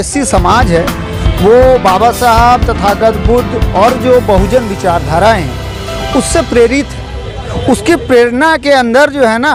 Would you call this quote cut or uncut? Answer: uncut